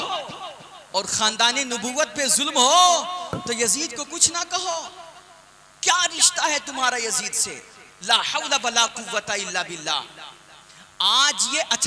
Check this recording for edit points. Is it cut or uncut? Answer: uncut